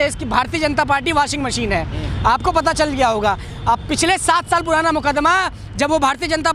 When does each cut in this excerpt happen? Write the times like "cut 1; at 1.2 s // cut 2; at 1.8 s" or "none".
none